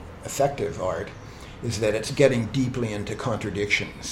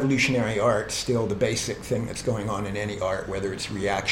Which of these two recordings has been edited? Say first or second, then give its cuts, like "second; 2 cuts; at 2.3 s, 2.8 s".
first; 1 cut; at 2.1 s